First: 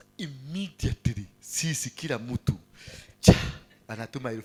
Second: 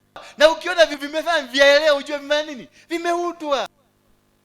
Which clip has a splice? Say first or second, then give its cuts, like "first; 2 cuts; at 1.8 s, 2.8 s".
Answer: second; 1 cut; at 0.9 s